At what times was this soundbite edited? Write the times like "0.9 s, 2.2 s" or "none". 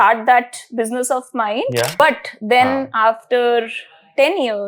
2.0 s